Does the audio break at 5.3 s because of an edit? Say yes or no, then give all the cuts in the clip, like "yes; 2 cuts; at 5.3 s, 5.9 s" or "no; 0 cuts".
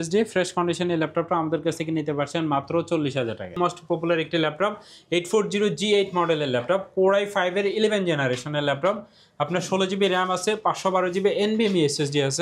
no; 1 cut; at 3.5 s